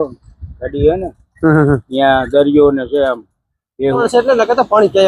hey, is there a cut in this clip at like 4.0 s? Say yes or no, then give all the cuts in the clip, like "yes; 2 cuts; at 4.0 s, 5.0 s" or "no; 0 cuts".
yes; 1 cut; at 4.0 s